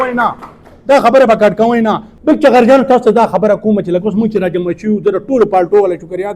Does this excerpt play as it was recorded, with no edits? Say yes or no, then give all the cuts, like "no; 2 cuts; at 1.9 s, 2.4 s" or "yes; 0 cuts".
no; 1 cut; at 2.1 s